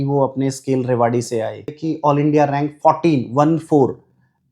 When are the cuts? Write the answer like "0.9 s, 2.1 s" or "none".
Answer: 1.8 s